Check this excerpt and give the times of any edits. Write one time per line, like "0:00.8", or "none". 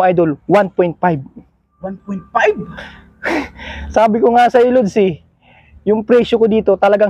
none